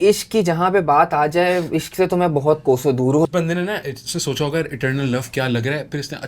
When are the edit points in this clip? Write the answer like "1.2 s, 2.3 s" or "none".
3.3 s

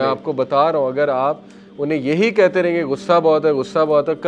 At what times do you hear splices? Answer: none

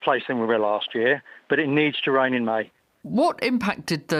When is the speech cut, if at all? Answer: none

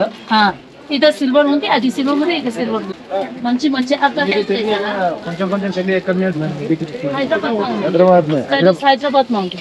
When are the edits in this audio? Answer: 3.0 s

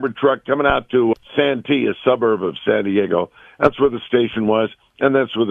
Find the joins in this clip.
1.1 s

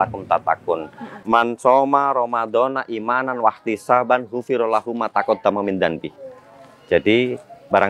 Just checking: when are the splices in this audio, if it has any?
1.2 s

